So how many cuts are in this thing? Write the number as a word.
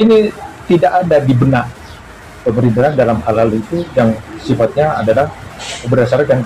zero